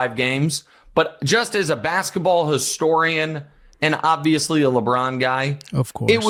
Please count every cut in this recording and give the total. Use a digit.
0